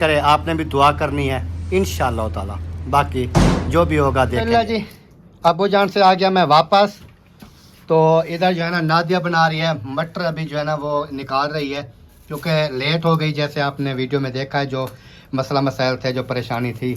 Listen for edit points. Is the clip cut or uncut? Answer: uncut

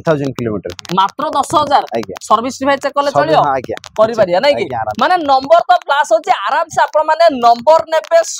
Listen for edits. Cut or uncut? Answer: uncut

